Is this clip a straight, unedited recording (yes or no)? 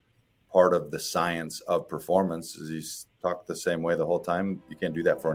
yes